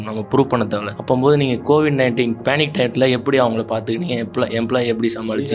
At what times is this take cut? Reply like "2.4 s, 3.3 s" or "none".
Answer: 0.9 s, 2.4 s